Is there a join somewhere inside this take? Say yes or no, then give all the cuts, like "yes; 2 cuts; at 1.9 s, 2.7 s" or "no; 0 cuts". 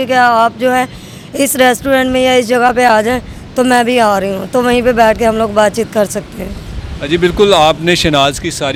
no; 0 cuts